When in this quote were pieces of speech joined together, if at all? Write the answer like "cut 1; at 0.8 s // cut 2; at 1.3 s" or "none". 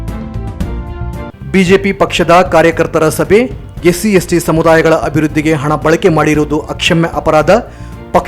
cut 1; at 1.3 s